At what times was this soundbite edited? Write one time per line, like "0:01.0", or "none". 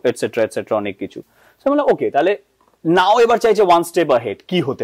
none